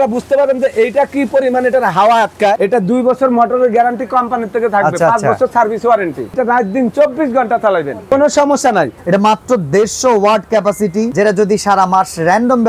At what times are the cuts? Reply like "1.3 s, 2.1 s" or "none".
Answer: 2.6 s, 6.3 s, 8.1 s, 9.0 s, 11.1 s